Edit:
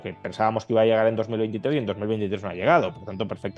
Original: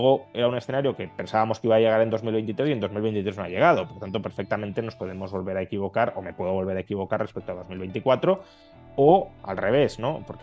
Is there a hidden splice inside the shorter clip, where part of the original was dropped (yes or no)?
no